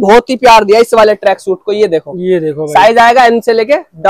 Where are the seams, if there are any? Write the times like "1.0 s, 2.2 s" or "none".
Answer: none

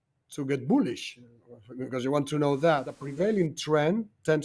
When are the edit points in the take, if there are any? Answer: 3.0 s

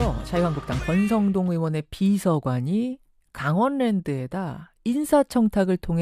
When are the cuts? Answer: none

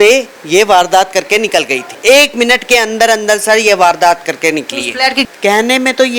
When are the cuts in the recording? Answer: 1.8 s, 5.2 s

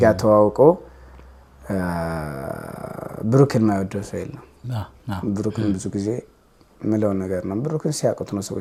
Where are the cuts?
none

